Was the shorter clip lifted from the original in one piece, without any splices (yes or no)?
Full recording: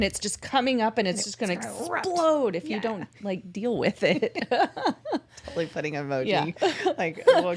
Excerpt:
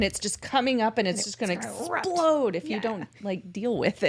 yes